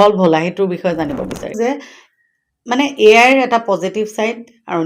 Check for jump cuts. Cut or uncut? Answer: cut